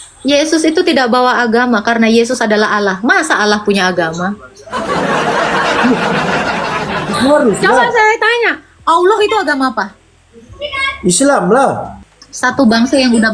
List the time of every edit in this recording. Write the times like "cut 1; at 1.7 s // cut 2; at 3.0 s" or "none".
cut 1; at 11.9 s